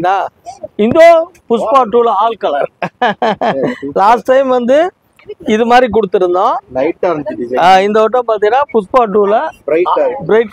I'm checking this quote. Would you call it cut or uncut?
uncut